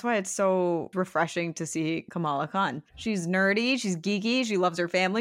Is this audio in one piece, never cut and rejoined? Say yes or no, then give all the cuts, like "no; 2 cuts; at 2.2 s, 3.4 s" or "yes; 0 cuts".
no; 2 cuts; at 0.9 s, 2.4 s